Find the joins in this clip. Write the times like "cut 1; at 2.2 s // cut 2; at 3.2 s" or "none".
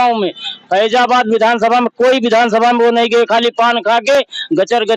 none

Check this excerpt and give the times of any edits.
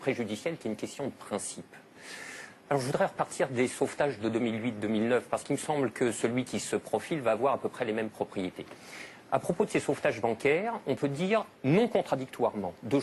cut 1; at 5.0 s

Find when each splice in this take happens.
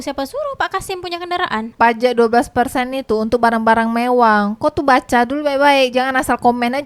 cut 1; at 1.7 s

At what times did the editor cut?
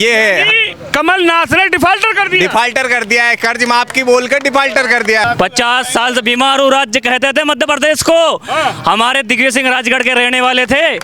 cut 1; at 5.2 s

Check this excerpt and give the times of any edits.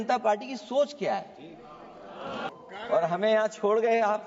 cut 1; at 2.5 s

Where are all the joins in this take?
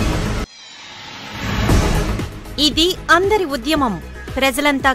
none

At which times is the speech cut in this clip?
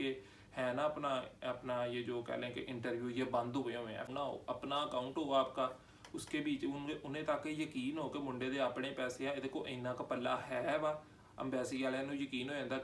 cut 1; at 4.1 s

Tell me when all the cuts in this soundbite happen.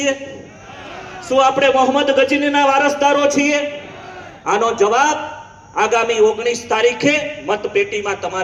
none

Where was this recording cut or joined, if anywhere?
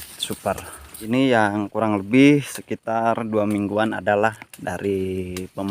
cut 1; at 0.9 s

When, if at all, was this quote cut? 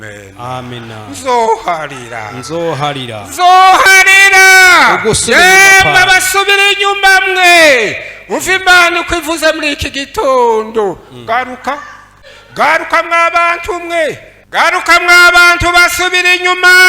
cut 1; at 12.1 s // cut 2; at 14.3 s

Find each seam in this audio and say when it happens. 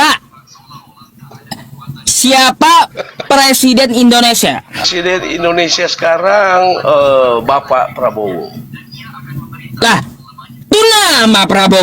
cut 1; at 4.8 s

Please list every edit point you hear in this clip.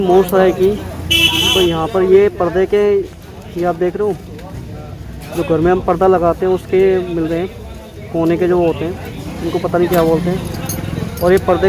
none

